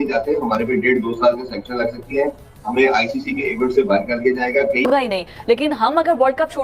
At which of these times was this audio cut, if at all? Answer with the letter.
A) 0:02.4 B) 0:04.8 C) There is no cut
B